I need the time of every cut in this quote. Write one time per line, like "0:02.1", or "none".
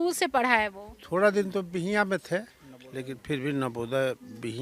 none